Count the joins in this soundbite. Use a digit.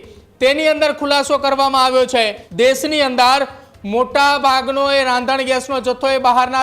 1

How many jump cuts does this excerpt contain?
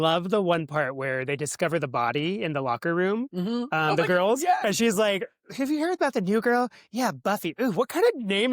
0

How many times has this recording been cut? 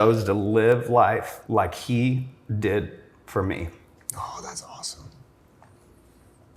1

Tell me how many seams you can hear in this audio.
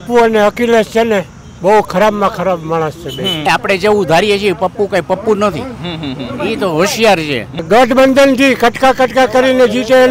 2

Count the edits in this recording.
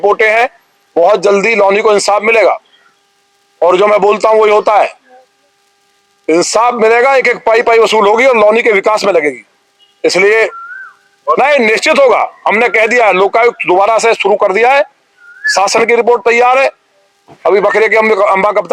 0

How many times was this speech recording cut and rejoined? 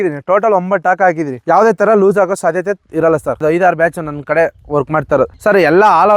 1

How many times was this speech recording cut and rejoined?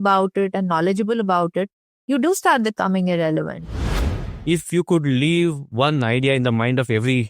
1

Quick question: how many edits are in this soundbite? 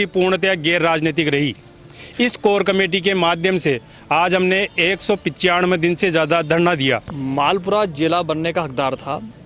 1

